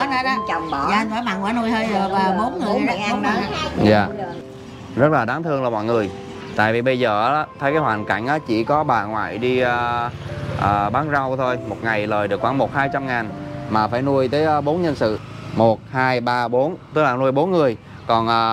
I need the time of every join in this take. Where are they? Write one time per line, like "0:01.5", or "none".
0:04.4
0:15.2